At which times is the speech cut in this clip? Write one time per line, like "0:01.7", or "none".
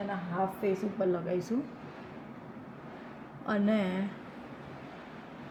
none